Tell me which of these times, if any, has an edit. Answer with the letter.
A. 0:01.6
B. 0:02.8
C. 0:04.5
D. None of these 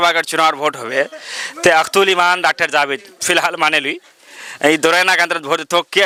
D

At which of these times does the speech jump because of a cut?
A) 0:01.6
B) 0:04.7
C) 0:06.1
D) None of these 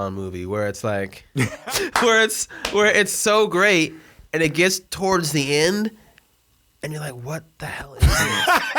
A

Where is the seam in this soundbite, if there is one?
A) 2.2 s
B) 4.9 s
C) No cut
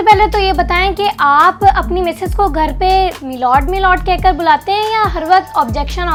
C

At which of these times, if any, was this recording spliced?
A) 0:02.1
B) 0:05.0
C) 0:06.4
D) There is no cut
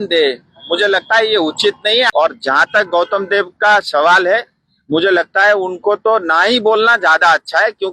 A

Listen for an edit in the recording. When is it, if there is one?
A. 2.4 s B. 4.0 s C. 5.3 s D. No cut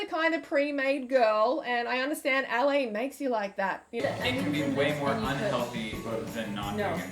B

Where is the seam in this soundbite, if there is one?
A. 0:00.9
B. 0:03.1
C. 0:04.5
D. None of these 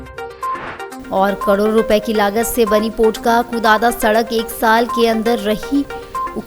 A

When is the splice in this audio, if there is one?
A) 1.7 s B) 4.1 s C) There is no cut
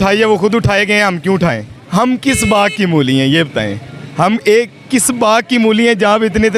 A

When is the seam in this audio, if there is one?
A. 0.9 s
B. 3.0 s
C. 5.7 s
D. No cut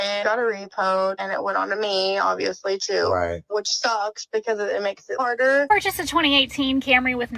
C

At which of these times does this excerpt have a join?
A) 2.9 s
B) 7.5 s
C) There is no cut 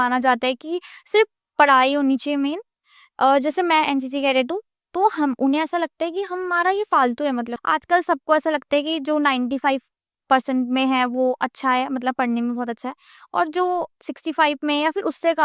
B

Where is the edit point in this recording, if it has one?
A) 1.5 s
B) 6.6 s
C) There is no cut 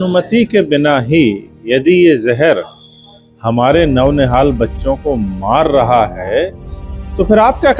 C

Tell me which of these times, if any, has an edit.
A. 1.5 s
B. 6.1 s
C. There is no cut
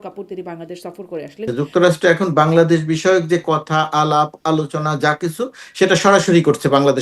A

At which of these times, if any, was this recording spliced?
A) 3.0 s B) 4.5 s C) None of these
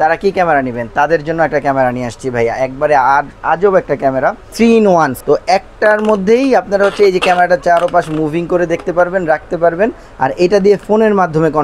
B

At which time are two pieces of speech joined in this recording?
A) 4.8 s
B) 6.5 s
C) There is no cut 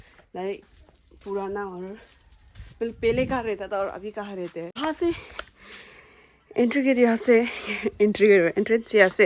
A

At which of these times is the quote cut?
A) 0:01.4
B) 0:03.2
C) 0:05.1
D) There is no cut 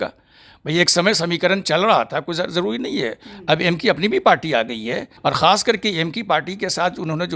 C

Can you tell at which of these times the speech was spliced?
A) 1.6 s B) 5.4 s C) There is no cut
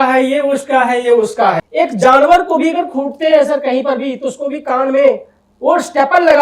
A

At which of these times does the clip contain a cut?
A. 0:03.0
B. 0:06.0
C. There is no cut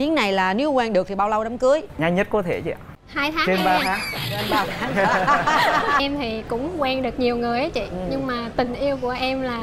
B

